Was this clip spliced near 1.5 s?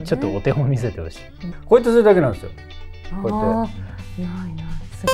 yes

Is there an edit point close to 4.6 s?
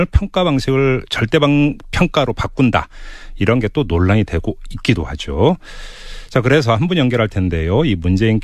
yes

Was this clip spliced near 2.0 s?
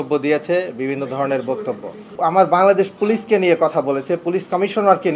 yes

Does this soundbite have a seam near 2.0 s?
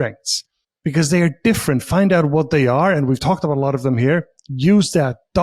no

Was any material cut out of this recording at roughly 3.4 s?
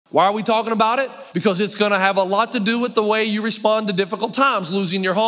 no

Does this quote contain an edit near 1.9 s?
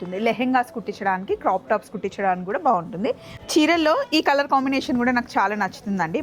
no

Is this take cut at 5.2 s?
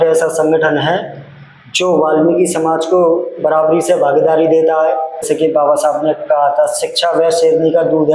yes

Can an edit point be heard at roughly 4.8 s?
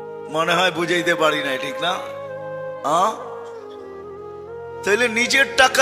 yes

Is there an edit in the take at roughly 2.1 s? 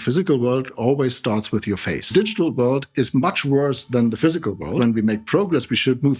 yes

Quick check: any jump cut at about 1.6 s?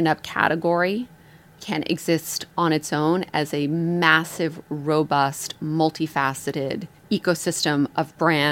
yes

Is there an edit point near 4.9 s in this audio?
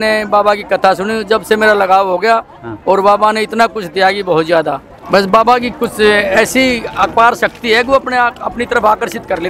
yes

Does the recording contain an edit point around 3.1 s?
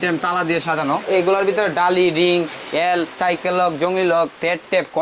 no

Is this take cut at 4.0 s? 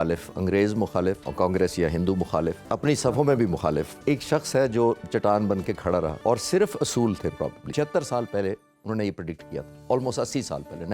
yes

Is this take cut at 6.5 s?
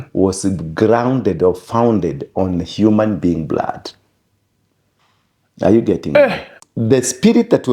yes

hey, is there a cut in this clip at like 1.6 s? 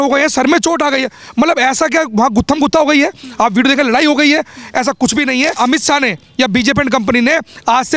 no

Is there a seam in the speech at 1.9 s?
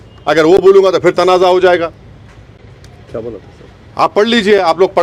no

